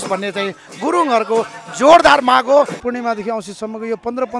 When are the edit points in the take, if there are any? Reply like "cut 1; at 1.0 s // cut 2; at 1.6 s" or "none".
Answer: cut 1; at 2.8 s